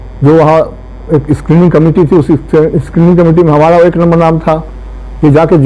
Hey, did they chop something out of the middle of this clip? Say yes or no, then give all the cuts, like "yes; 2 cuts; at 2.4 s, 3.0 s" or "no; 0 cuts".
no; 0 cuts